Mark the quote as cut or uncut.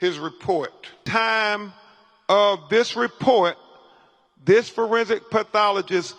cut